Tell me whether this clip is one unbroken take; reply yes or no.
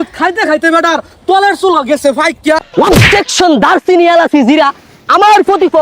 no